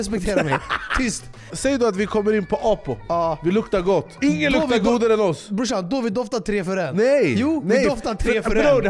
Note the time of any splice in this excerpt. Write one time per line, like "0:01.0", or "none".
0:01.5
0:03.0
0:04.1
0:06.9